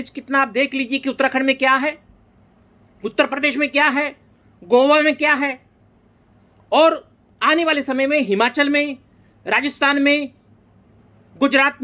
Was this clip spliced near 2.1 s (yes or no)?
no